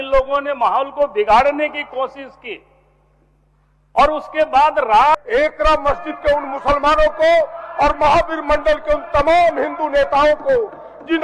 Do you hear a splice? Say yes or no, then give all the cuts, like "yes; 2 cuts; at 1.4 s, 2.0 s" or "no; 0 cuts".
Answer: yes; 1 cut; at 5.1 s